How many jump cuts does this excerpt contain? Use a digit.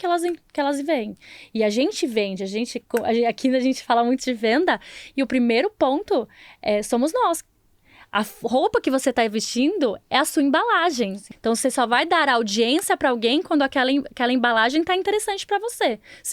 1